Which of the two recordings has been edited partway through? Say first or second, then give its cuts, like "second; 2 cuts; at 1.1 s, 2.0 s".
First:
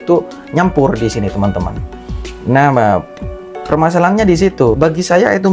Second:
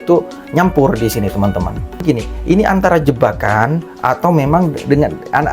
second; 1 cut; at 2.0 s